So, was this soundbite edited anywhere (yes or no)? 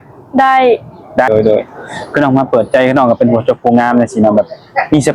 yes